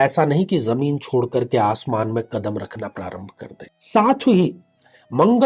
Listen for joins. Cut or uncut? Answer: cut